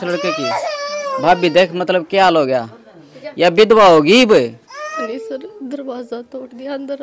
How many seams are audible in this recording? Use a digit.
1